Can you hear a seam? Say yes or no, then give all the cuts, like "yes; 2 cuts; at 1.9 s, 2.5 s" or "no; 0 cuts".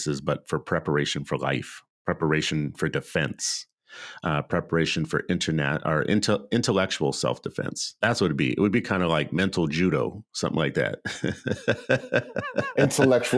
yes; 1 cut; at 7.9 s